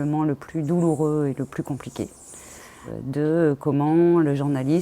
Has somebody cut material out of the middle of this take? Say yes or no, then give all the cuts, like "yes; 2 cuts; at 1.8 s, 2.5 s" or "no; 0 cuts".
yes; 1 cut; at 2.9 s